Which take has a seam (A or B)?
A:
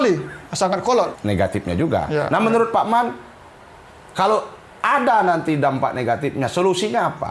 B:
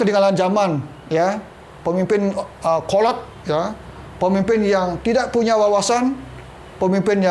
A